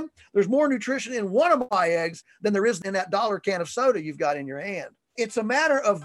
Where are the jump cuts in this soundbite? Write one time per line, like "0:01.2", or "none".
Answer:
0:01.7
0:02.8
0:05.2